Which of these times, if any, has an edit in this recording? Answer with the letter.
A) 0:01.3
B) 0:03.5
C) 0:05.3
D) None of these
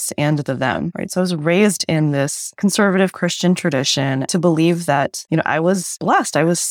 D